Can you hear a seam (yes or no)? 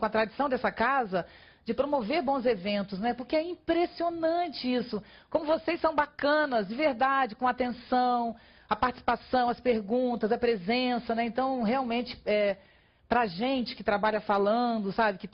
yes